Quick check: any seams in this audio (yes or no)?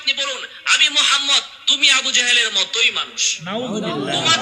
yes